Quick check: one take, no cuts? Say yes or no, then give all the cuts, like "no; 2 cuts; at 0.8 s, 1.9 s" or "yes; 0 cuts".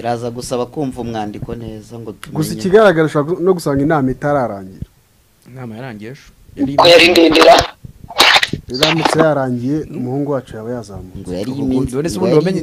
yes; 0 cuts